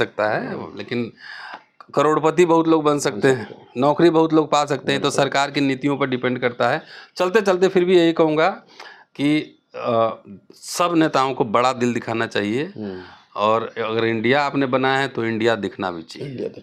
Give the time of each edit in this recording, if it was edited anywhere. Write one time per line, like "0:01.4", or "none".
none